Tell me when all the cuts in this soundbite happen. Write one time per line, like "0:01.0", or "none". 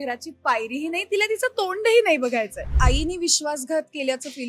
0:02.7

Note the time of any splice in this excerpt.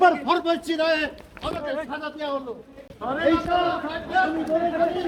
none

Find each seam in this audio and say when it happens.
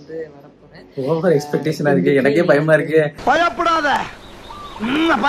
none

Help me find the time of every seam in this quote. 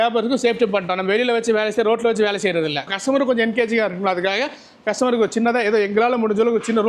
0:02.9

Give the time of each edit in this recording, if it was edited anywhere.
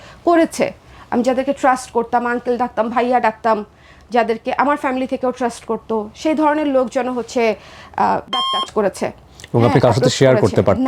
none

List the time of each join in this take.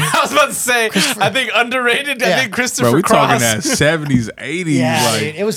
none

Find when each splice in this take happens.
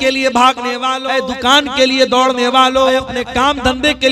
0:01.0
0:03.1

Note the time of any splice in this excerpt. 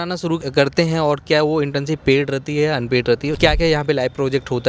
0:03.3

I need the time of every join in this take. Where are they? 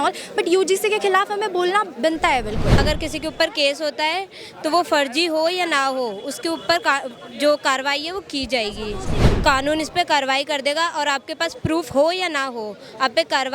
0:02.8
0:09.2

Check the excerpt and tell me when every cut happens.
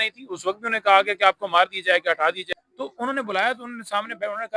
0:02.4

